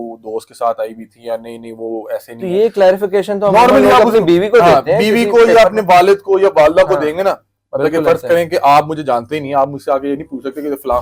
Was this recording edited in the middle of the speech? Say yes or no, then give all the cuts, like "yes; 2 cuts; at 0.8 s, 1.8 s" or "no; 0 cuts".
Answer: no; 0 cuts